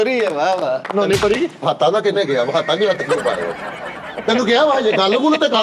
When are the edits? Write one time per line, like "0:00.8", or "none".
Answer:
none